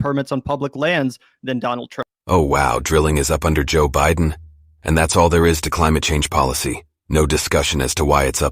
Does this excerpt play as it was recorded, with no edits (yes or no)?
no